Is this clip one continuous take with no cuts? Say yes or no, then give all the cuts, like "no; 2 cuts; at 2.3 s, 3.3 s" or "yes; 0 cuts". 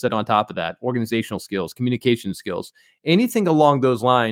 yes; 0 cuts